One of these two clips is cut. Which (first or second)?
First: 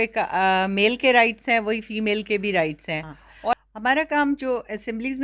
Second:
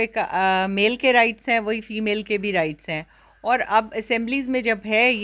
first